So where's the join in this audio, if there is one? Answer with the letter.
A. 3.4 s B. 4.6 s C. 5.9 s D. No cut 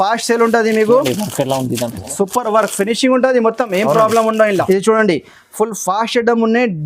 B